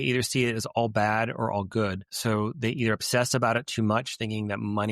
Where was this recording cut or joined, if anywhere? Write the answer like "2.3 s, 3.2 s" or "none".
2.1 s